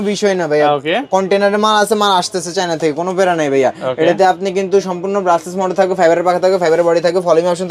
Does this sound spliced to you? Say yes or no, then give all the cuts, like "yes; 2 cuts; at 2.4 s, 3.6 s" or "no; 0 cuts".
no; 0 cuts